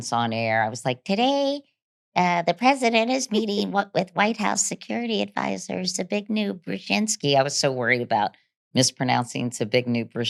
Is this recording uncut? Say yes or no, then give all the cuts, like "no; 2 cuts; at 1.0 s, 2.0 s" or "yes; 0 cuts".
yes; 0 cuts